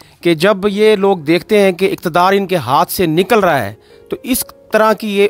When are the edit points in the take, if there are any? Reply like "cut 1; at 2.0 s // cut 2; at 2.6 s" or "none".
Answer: none